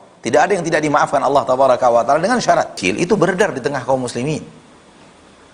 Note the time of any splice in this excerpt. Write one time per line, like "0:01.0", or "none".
0:02.8